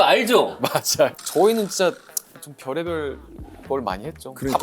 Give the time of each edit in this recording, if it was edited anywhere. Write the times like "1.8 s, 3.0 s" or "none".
1.2 s